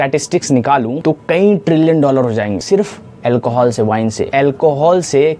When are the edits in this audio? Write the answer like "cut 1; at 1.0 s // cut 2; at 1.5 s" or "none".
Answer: cut 1; at 1.0 s // cut 2; at 2.6 s // cut 3; at 4.3 s

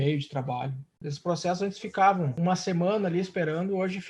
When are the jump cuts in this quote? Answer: cut 1; at 1.0 s // cut 2; at 2.3 s

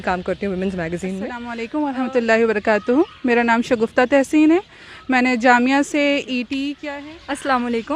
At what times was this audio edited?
cut 1; at 1.6 s // cut 2; at 6.8 s

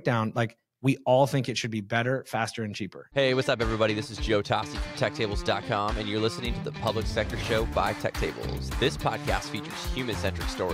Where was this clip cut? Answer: cut 1; at 3.0 s

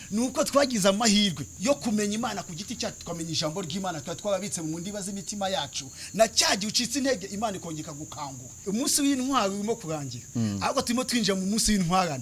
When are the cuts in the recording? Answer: cut 1; at 1.5 s // cut 2; at 8.6 s

